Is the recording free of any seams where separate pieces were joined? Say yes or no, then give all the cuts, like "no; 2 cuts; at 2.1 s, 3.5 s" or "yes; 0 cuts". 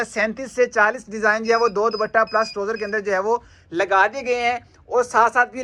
yes; 0 cuts